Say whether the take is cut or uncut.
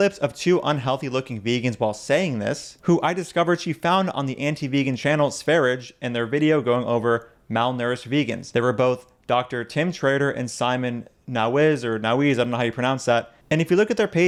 uncut